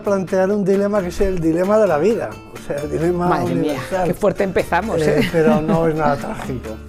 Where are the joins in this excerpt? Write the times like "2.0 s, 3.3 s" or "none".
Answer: none